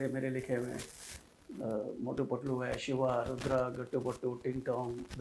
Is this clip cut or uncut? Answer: uncut